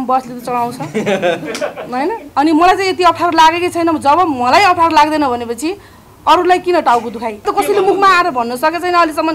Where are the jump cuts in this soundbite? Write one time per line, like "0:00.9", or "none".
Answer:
0:02.2
0:07.5